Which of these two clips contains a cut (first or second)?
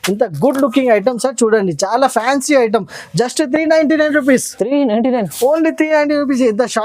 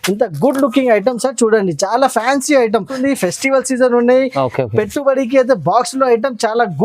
second